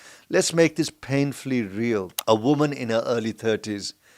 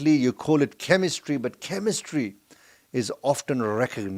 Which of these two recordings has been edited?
first; 1 cut; at 2.1 s

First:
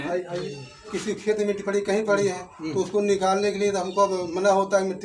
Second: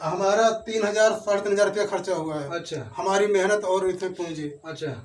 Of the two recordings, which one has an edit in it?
first; 1 cut; at 1.0 s

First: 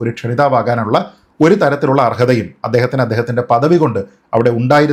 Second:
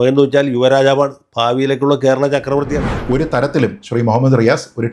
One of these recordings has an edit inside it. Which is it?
second; 1 cut; at 2.8 s

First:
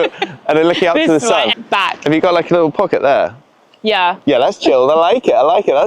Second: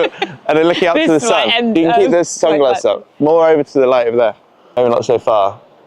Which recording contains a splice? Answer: first; 1 cut; at 1.5 s

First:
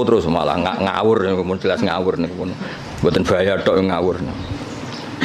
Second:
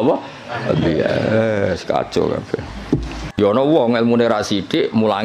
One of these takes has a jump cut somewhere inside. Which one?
second; 1 cut; at 3.3 s

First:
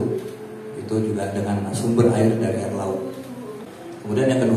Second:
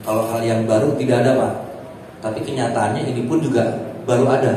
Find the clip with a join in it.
first; 1 cut; at 3.6 s

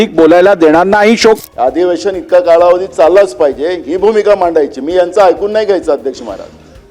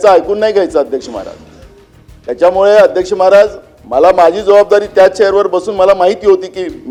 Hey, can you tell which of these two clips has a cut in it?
first; 1 cut; at 1.4 s

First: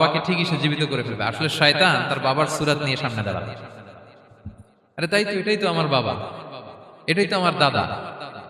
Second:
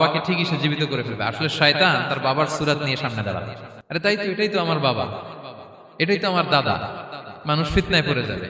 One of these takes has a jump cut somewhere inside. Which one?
second; 1 cut; at 4.0 s

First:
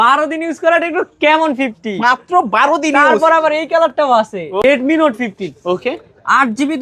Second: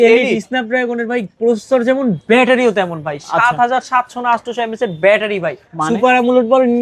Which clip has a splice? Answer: first; 1 cut; at 4.6 s

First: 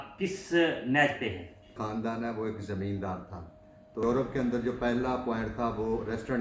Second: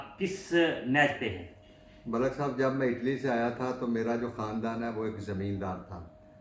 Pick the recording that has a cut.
first; 2 cuts; at 1.8 s, 4.0 s

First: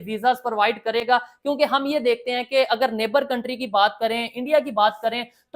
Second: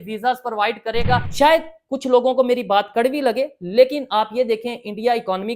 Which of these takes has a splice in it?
second; 1 cut; at 1.3 s

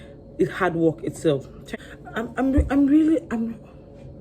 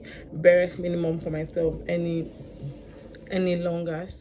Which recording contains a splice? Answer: first; 1 cut; at 1.6 s

